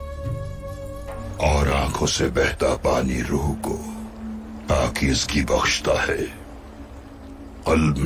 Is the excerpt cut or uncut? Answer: uncut